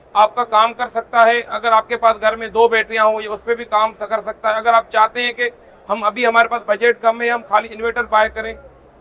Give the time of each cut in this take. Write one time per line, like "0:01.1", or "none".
none